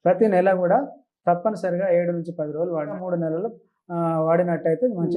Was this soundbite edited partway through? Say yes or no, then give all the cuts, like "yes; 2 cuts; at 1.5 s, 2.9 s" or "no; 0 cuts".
yes; 1 cut; at 3.0 s